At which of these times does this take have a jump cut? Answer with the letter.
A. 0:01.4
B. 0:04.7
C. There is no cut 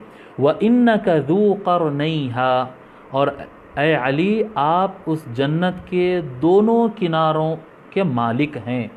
C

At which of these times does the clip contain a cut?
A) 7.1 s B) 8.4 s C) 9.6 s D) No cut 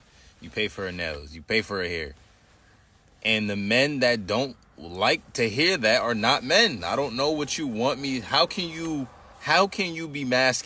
A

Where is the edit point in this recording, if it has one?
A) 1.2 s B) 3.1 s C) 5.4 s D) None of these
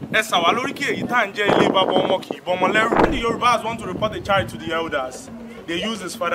B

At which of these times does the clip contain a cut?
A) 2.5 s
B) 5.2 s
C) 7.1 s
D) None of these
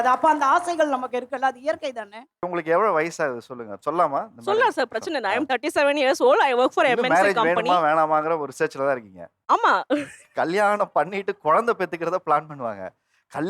A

